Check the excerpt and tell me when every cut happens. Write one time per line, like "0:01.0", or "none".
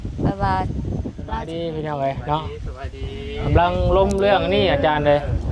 0:01.5